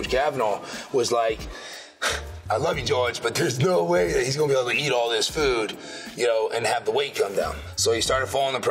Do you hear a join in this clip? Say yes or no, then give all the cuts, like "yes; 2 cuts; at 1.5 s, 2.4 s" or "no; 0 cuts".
no; 0 cuts